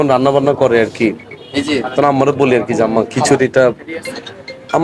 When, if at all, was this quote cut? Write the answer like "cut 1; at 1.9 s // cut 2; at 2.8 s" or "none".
none

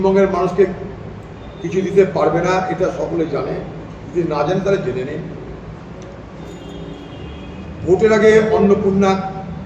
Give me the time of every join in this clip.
none

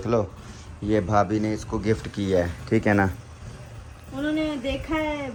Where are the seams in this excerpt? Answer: none

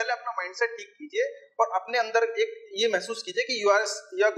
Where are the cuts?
none

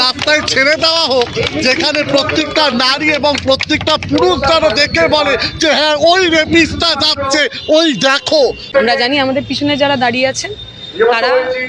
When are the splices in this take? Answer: cut 1; at 8.7 s

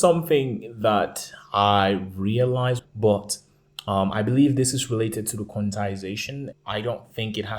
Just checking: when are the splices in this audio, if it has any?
cut 1; at 2.8 s // cut 2; at 6.5 s

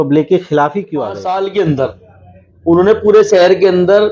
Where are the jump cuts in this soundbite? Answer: cut 1; at 1.2 s

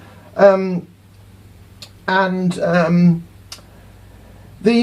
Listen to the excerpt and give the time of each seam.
cut 1; at 3.2 s

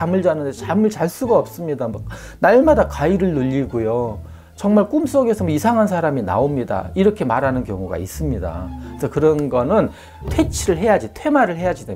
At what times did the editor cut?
none

